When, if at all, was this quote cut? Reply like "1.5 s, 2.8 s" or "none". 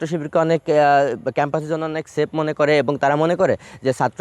none